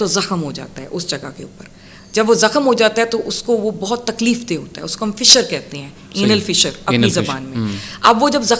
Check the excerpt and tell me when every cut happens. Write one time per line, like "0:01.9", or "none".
none

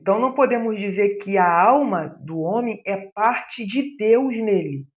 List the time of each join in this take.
none

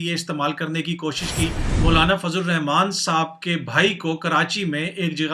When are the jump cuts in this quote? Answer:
0:01.7

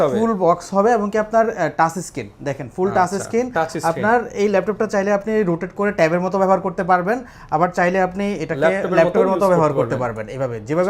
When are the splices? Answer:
none

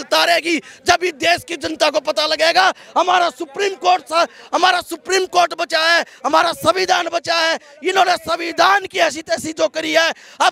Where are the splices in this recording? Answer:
none

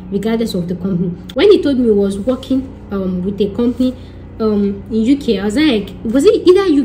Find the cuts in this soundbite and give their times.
0:01.2

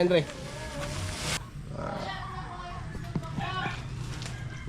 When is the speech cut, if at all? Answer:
0:01.4

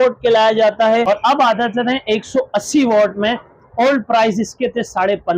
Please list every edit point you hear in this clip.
0:01.2

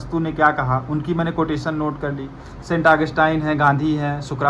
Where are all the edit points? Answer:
none

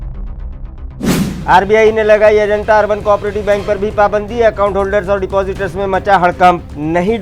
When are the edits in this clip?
0:01.1

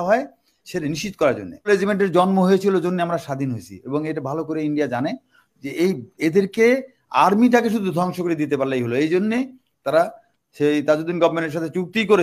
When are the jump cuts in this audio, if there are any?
0:01.7

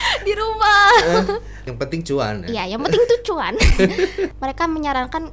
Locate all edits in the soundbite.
0:01.6
0:04.3

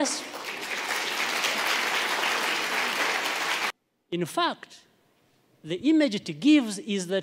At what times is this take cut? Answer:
0:03.7

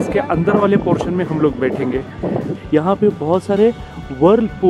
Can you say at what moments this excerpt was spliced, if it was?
0:02.5

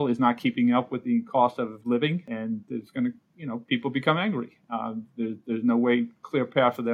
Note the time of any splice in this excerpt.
0:02.3

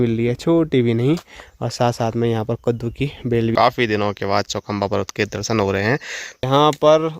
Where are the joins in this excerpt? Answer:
0:03.5
0:06.4

